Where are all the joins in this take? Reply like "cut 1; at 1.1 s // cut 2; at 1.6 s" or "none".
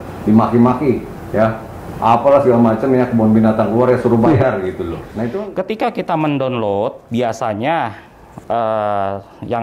cut 1; at 5.2 s